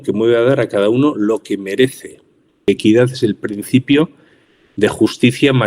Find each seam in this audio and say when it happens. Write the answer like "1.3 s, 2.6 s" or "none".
2.7 s